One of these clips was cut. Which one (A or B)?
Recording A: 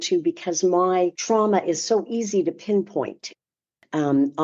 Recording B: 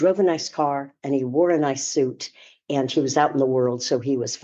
A